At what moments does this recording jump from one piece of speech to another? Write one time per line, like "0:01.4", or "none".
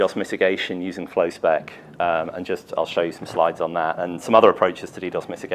0:03.4

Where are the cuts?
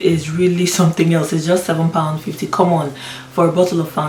none

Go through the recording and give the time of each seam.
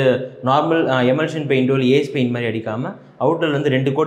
none

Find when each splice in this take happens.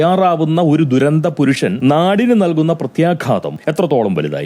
0:01.8
0:03.5

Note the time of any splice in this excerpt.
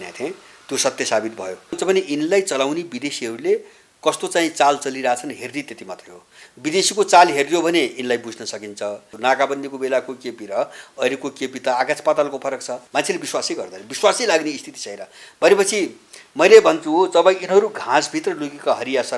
0:01.8
0:09.1
0:12.8

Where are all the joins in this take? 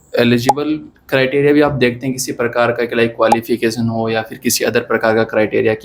none

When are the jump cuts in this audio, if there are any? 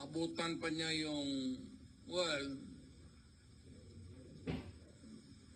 none

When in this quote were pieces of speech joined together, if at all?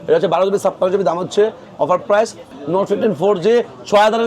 0:02.5

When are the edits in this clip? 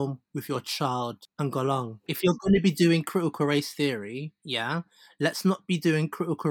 0:01.2
0:02.1

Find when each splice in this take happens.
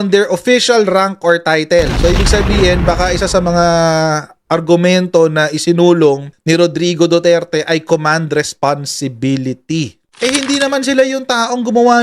none

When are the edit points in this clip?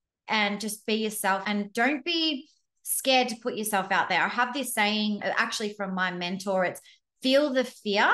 0:01.4
0:05.2

